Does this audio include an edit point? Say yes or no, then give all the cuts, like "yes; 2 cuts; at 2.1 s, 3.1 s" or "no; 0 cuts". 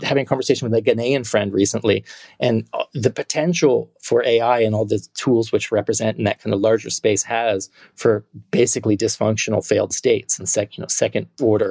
no; 0 cuts